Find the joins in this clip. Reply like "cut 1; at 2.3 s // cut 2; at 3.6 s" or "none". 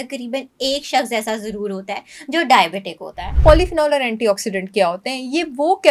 cut 1; at 3.3 s